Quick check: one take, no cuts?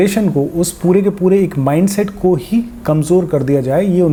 yes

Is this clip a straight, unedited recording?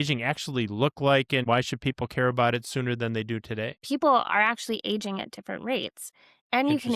no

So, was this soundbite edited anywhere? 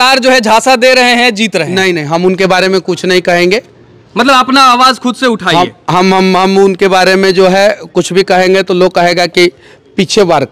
no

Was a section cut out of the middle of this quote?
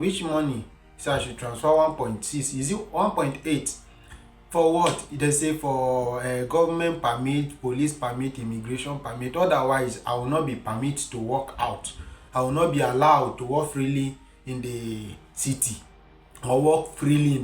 no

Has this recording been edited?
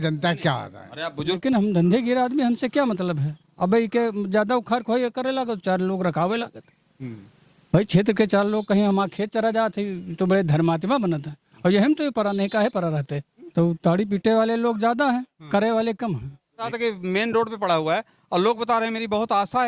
yes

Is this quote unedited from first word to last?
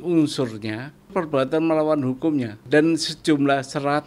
no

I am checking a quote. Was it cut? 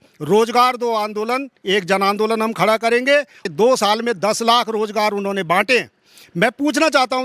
yes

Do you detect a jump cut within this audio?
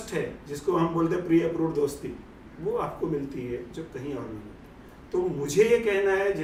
no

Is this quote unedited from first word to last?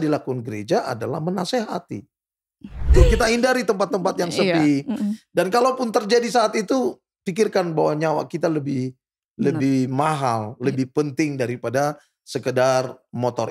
no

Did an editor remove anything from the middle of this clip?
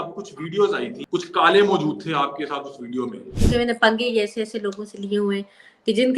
yes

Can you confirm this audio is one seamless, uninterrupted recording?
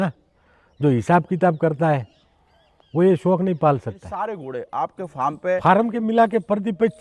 no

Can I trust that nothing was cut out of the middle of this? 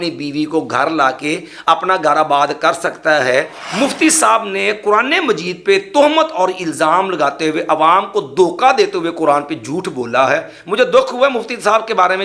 no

